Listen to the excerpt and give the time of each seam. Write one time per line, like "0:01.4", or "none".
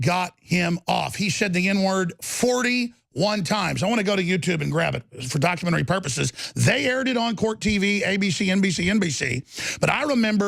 none